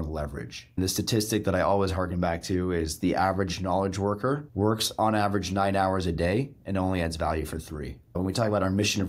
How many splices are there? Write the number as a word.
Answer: one